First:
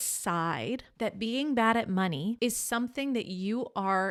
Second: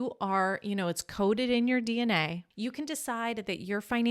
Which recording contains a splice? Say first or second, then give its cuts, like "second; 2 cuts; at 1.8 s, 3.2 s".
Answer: second; 1 cut; at 2.4 s